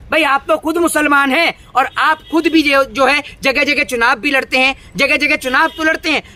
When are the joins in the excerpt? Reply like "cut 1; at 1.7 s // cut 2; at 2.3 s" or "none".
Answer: none